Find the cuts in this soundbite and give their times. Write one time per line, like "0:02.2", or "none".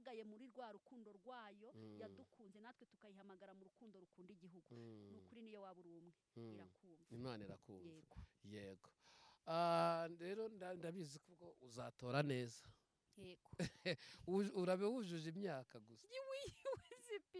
none